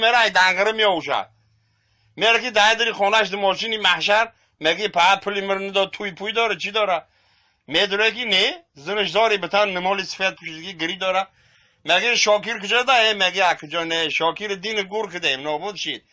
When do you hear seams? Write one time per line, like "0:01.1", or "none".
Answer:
none

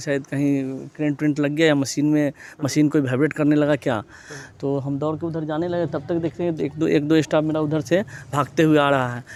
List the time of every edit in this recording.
none

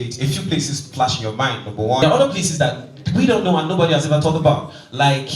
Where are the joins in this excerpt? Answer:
0:02.0

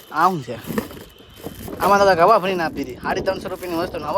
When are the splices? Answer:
none

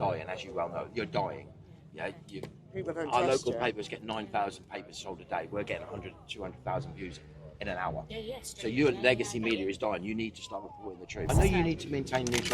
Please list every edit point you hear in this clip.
0:11.3

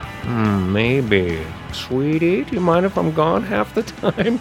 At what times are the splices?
none

